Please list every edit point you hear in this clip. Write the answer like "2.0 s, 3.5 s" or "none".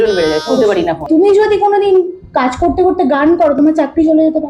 1.1 s